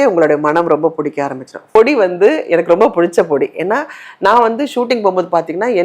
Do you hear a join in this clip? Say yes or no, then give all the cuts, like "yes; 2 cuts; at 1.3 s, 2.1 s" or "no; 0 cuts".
yes; 1 cut; at 1.6 s